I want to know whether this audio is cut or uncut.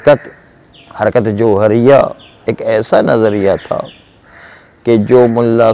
uncut